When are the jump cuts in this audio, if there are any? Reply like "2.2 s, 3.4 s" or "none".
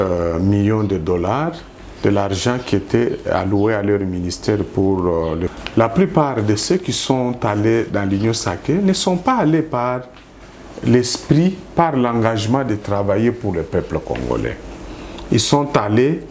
5.6 s